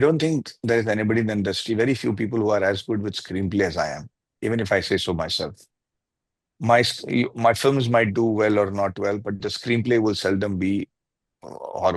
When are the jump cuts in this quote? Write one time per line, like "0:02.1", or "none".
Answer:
none